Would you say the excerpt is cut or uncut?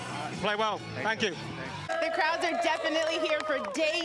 cut